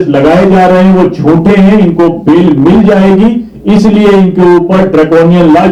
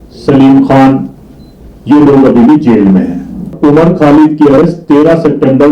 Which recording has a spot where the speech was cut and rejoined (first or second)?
second